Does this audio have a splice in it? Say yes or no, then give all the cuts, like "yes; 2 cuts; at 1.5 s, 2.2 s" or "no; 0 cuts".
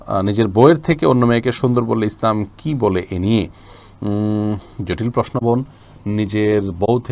no; 0 cuts